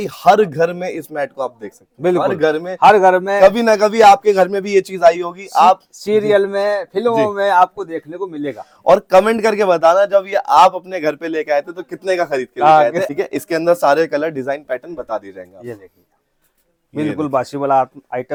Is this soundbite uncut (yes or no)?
yes